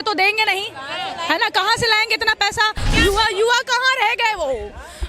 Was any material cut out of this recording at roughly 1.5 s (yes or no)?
no